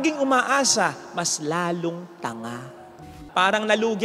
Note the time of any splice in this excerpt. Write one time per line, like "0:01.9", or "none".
0:03.0